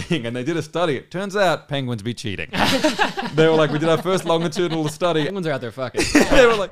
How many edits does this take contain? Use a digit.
1